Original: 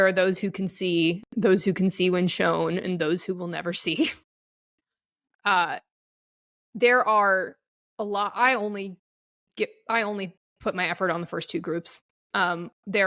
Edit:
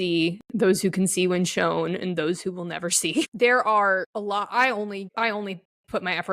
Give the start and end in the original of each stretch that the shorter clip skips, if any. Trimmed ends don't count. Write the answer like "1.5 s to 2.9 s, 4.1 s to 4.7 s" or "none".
4.1 s to 6.7 s, 7.5 s to 7.9 s, 8.9 s to 9.8 s